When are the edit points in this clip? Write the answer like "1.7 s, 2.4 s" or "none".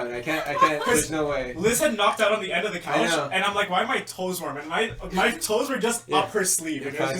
none